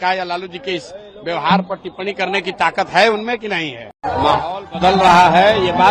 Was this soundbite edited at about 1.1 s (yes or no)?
no